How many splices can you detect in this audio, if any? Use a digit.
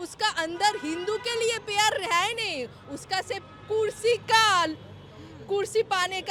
0